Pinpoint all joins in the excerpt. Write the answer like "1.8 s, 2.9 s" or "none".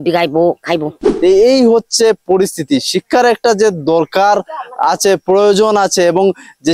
1.2 s